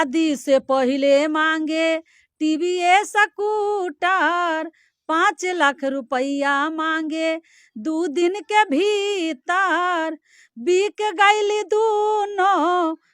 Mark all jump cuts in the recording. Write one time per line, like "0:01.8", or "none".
none